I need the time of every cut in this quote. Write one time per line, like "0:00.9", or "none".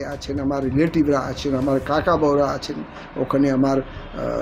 none